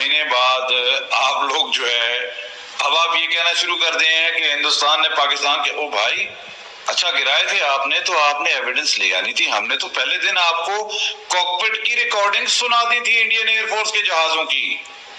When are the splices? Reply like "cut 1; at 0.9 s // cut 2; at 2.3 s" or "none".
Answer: none